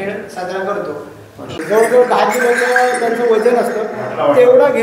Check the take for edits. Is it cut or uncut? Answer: cut